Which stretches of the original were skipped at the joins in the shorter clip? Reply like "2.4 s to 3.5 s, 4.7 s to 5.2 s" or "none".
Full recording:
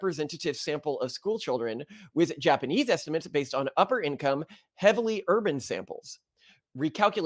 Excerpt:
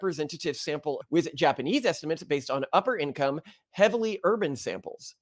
1.0 s to 2.0 s